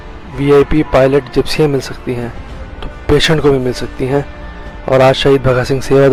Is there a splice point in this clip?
no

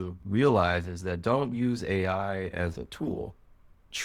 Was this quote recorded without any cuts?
yes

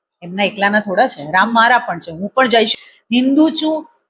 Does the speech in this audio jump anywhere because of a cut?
yes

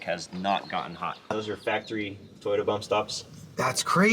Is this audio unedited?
no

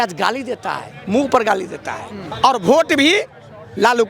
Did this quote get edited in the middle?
yes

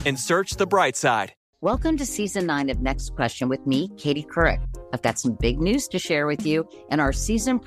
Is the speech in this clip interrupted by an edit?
no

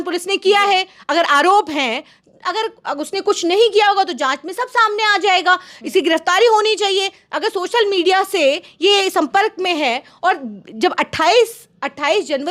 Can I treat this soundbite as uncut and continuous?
yes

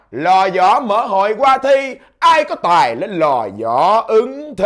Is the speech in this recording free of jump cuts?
yes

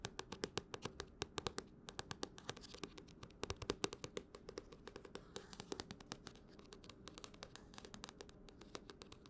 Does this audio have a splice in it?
no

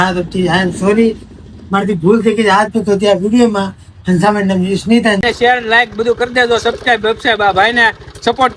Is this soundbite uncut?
no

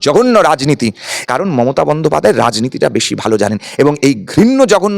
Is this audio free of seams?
no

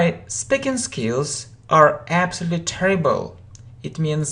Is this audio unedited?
no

